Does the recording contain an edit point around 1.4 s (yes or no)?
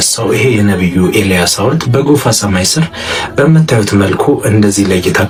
no